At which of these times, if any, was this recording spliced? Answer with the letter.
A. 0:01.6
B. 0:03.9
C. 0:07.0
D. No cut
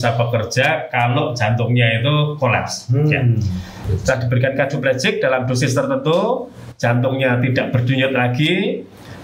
B